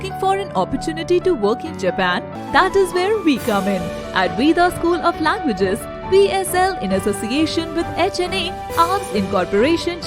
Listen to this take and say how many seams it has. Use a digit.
1